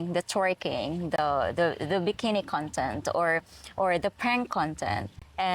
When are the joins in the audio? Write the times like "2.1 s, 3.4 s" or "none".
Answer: none

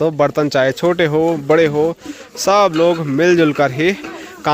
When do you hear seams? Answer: none

